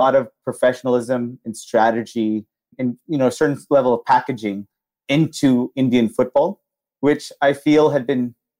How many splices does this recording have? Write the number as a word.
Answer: one